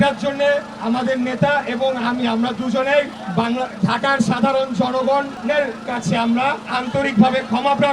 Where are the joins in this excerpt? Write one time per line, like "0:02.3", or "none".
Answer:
0:03.2
0:05.3